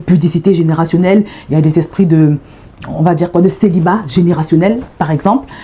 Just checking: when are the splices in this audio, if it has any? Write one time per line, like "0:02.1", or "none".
none